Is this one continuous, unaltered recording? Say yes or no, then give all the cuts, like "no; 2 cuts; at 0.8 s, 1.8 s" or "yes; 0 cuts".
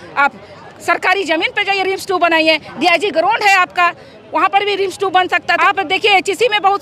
no; 1 cut; at 5.5 s